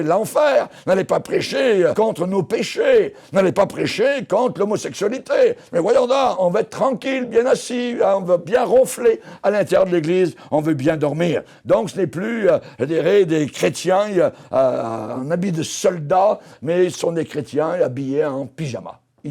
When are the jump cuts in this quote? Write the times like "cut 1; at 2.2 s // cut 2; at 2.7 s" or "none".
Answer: cut 1; at 1.9 s // cut 2; at 6.4 s // cut 3; at 15.2 s